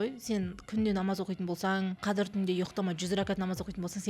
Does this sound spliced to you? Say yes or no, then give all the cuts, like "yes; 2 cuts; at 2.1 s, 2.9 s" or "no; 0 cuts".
yes; 1 cut; at 2.0 s